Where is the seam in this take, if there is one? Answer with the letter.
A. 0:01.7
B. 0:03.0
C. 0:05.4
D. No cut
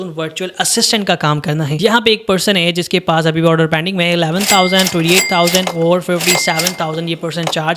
A